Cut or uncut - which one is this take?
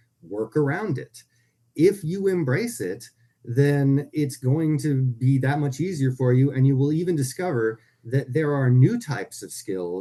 uncut